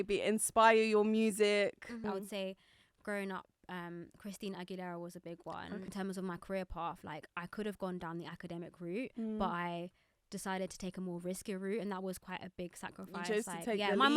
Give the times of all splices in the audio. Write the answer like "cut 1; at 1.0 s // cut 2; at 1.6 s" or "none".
cut 1; at 5.9 s